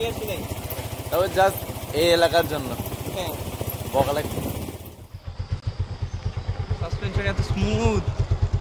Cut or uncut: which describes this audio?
cut